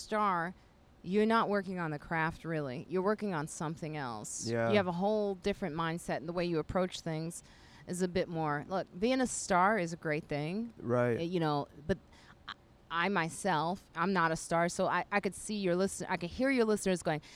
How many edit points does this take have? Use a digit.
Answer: 0